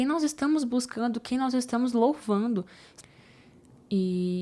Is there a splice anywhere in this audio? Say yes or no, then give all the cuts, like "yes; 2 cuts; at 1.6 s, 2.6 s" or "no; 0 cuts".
no; 0 cuts